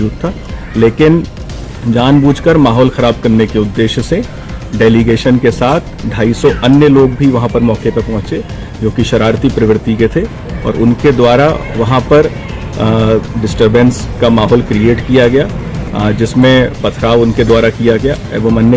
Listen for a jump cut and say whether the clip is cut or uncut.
uncut